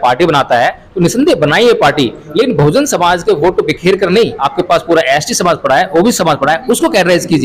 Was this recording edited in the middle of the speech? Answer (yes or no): yes